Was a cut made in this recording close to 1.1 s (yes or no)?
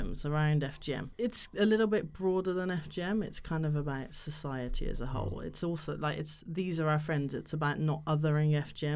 yes